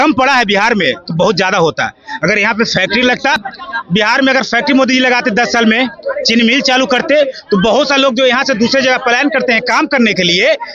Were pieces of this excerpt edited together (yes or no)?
no